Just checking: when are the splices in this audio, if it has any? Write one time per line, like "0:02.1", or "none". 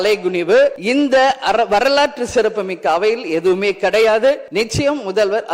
0:00.8
0:04.5

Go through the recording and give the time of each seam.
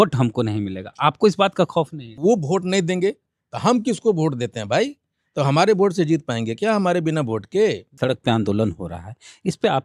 0:02.1
0:08.0

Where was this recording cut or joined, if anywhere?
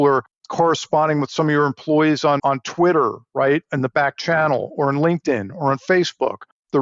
0:02.4

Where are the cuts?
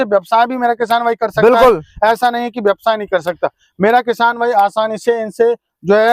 none

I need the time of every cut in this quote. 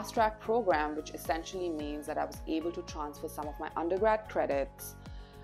none

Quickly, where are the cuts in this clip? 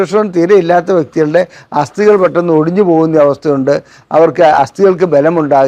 none

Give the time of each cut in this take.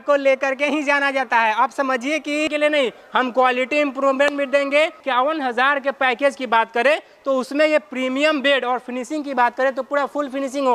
0:02.5

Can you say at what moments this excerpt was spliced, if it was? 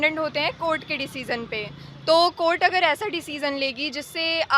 none

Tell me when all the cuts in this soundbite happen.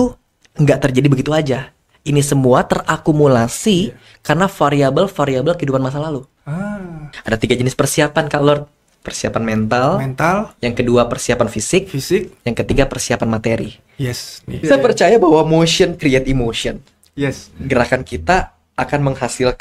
0:07.1
0:14.5

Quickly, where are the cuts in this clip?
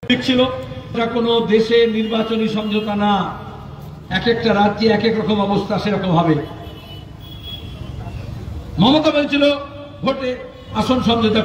0:00.9

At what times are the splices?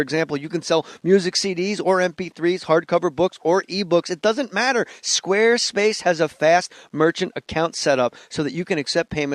0:01.5

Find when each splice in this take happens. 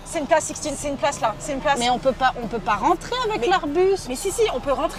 none

